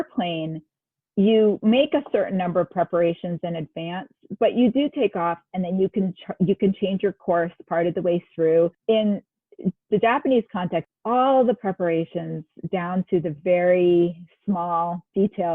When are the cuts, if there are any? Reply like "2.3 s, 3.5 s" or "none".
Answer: 8.8 s, 10.9 s